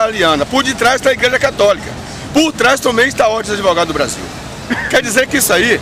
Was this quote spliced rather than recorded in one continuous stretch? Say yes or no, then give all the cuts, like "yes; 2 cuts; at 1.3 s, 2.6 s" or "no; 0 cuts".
no; 0 cuts